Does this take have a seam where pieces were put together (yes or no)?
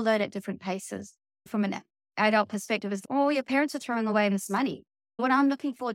yes